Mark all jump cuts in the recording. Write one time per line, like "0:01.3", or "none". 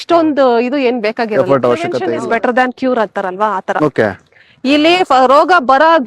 0:02.0